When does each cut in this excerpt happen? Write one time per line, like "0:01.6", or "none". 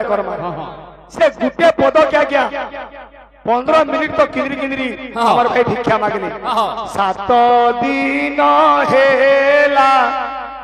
none